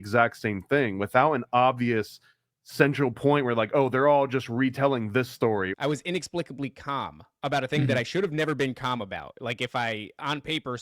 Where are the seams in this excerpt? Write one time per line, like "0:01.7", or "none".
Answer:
0:05.7